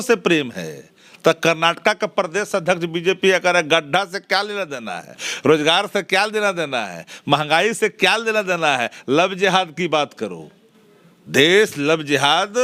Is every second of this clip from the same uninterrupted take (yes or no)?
yes